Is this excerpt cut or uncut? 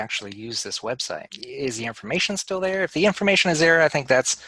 cut